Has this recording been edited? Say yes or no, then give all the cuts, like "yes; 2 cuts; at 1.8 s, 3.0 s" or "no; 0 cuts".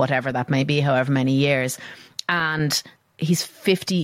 yes; 1 cut; at 3.1 s